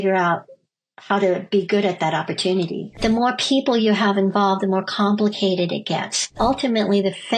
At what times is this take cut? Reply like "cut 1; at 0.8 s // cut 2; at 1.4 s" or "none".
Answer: cut 1; at 3.0 s // cut 2; at 6.3 s